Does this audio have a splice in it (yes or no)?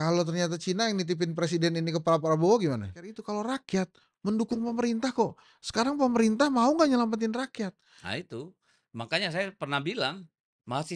yes